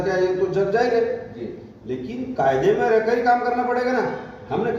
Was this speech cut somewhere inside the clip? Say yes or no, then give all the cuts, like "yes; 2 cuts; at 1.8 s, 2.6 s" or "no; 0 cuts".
no; 0 cuts